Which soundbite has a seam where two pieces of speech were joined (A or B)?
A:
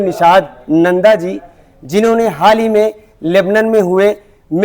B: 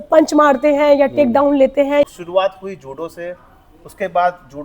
B